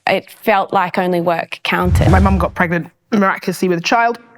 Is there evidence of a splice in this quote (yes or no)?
yes